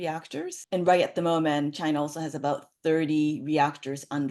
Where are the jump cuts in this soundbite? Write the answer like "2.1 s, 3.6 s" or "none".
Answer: none